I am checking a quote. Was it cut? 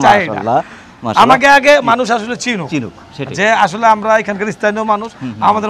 no; 0 cuts

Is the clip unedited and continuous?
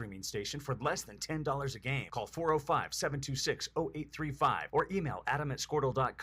no; 1 cut; at 4.1 s

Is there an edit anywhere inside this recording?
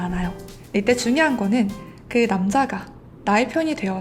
no; 0 cuts

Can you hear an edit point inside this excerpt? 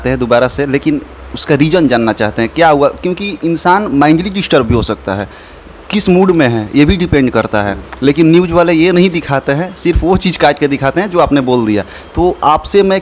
no; 0 cuts

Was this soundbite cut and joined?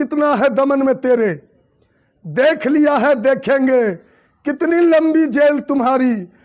no; 0 cuts

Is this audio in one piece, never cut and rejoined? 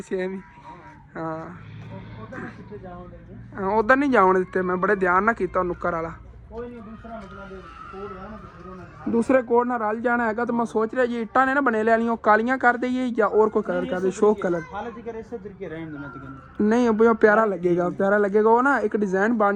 yes; 0 cuts

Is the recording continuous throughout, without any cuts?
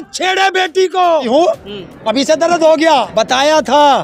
no; 2 cuts; at 1.3 s, 3.1 s

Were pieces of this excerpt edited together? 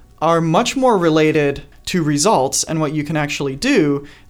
yes; 1 cut; at 1.7 s

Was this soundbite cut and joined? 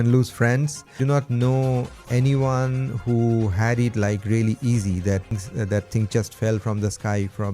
yes; 2 cuts; at 1.0 s, 5.3 s

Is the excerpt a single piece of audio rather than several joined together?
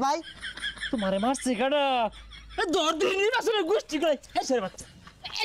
yes; 0 cuts

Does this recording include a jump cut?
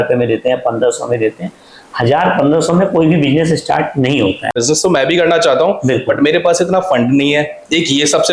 yes; 1 cut; at 4.5 s

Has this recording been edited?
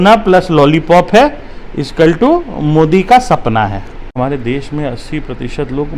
yes; 1 cut; at 4.1 s

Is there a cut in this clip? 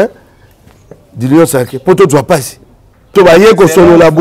yes; 1 cut; at 3.1 s

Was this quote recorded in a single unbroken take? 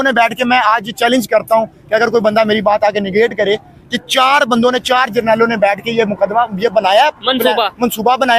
yes; 0 cuts

